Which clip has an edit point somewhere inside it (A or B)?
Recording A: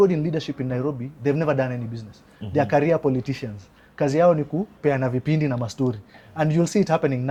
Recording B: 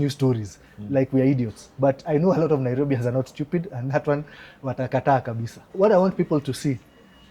B